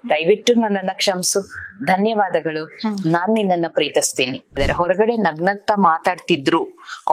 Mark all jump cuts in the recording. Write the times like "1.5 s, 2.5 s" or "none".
4.6 s